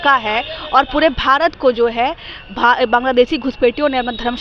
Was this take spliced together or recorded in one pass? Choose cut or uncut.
uncut